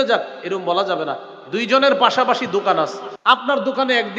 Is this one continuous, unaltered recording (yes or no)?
no